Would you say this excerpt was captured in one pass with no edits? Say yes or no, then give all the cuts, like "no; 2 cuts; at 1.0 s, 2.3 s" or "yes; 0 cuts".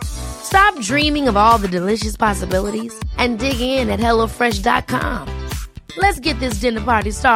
yes; 0 cuts